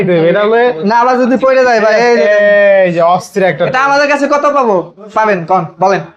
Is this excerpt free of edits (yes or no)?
yes